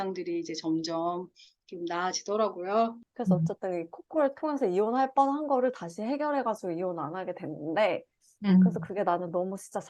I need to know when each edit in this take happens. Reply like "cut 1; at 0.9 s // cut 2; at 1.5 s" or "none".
cut 1; at 3.0 s